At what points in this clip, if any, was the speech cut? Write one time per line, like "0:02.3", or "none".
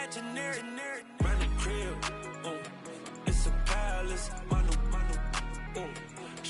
none